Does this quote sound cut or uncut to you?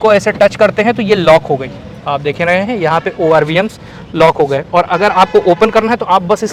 uncut